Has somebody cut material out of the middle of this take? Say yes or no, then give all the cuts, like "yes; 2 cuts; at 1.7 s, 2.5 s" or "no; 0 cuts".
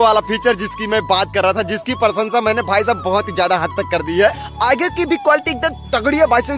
yes; 1 cut; at 4.5 s